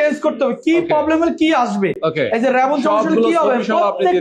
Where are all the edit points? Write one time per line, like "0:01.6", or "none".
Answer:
none